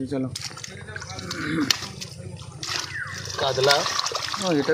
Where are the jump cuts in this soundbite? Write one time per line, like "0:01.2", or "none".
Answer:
none